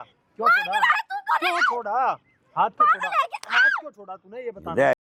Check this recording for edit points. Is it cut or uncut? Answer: uncut